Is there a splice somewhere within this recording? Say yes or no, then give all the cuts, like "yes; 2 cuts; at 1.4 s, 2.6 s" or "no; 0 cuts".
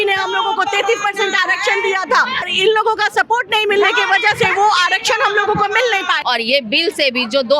yes; 2 cuts; at 2.5 s, 6.2 s